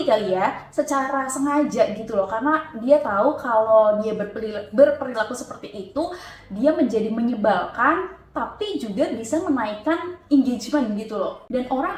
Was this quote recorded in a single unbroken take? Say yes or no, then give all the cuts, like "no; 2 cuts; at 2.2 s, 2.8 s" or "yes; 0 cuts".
yes; 0 cuts